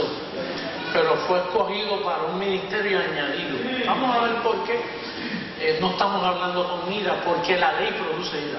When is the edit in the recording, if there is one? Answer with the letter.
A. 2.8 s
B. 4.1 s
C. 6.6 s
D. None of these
C